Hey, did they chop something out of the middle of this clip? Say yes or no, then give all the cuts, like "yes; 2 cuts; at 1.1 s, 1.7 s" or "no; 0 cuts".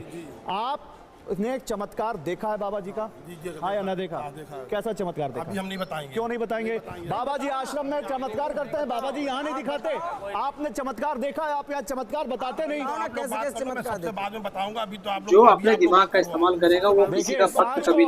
yes; 1 cut; at 15.3 s